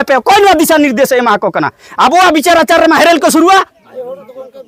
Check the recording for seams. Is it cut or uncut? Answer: uncut